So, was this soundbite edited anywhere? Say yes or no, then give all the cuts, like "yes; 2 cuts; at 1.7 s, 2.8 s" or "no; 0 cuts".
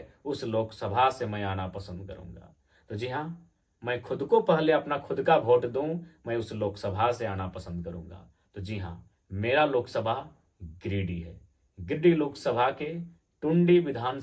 no; 0 cuts